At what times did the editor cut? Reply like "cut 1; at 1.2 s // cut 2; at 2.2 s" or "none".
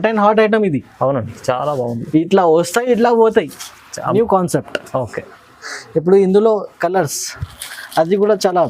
cut 1; at 4.1 s